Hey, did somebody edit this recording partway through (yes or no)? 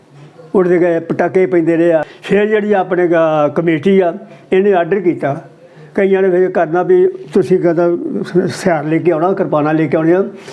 yes